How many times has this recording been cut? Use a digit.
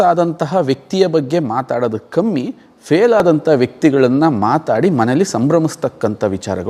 0